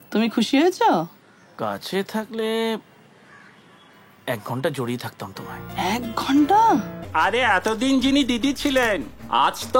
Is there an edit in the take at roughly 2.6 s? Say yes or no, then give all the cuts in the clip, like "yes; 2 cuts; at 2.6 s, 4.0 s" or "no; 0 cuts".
no; 1 cut; at 7.0 s